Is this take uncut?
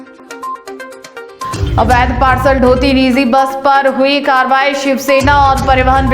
yes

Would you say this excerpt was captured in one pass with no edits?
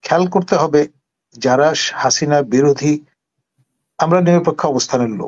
yes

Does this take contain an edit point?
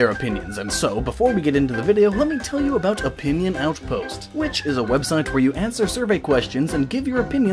no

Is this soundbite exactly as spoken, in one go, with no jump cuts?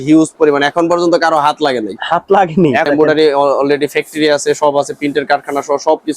no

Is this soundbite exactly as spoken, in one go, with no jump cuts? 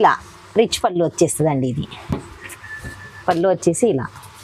yes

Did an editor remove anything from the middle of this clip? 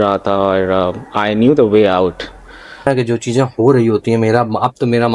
yes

